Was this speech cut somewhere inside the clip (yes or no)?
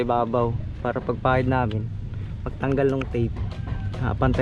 no